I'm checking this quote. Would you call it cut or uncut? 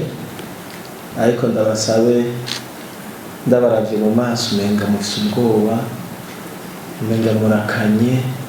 uncut